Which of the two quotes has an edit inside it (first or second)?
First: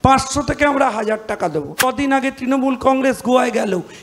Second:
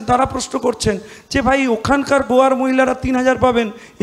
first